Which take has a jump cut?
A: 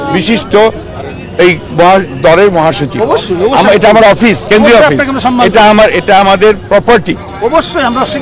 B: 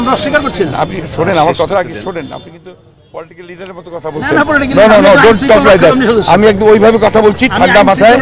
A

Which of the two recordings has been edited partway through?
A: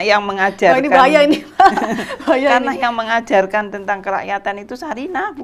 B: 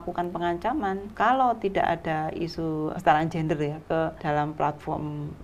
B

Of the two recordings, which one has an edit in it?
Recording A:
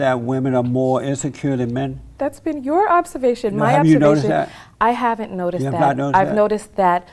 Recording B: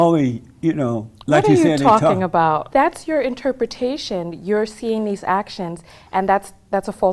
B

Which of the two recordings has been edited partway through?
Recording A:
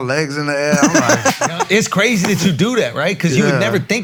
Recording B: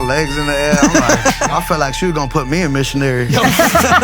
B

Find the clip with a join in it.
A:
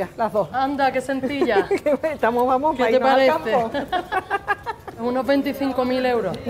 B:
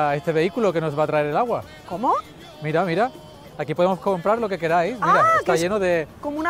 A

